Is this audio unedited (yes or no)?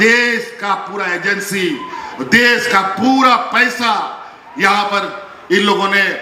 yes